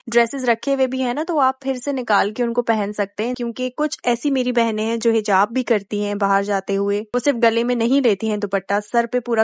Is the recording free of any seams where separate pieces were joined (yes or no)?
no